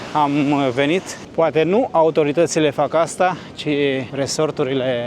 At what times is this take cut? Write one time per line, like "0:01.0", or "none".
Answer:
0:01.2
0:04.1